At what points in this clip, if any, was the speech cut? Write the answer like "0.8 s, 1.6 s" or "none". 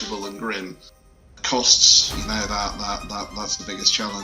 1.2 s